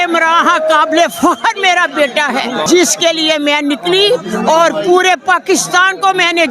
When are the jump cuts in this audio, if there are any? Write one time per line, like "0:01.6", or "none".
0:02.6